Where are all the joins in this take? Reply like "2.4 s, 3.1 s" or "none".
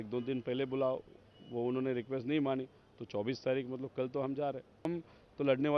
4.9 s